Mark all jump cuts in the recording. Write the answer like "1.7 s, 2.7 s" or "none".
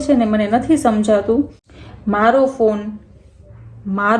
1.6 s